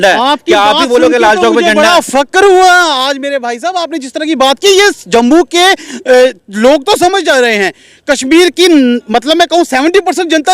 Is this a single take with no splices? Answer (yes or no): yes